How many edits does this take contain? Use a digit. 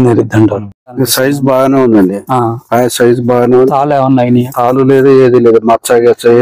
1